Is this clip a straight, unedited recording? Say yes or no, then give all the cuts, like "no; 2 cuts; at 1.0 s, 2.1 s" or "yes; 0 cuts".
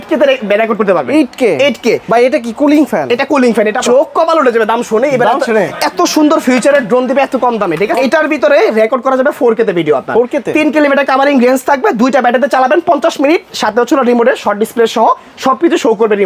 no; 2 cuts; at 3.8 s, 7.9 s